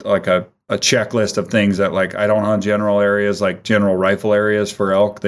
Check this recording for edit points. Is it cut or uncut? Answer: uncut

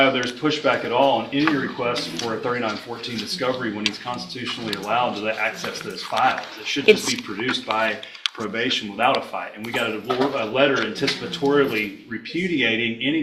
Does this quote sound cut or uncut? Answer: uncut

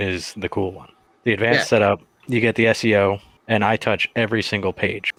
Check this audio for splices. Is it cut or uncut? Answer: uncut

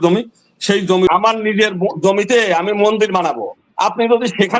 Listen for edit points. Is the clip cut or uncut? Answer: cut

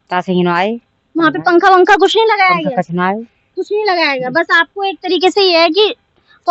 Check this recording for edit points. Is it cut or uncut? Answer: uncut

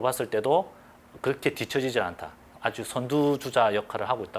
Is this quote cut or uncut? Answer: uncut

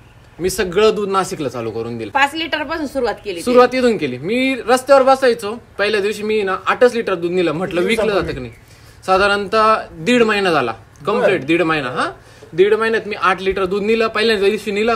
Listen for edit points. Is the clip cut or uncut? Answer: uncut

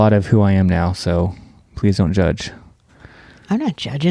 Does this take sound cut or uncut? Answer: uncut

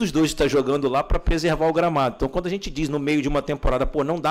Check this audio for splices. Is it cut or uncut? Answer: uncut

